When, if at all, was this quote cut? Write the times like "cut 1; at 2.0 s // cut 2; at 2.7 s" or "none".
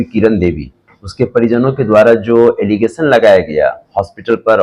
none